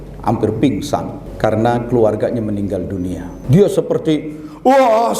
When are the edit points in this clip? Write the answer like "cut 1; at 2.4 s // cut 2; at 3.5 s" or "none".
cut 1; at 1.2 s // cut 2; at 3.3 s